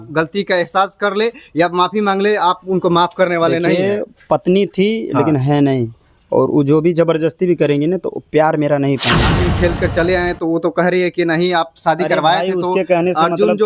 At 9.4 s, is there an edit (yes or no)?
yes